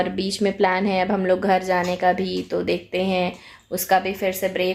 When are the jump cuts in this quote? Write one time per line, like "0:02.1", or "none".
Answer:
none